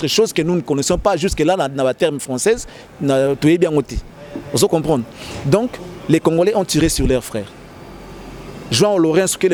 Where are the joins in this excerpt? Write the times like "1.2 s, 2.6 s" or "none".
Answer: none